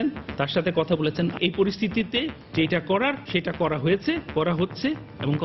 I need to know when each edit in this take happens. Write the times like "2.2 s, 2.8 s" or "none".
1.4 s, 2.4 s, 3.2 s